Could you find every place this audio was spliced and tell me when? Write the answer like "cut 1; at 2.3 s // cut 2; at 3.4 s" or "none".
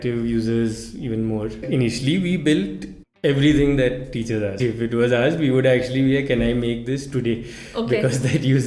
cut 1; at 1.6 s // cut 2; at 4.6 s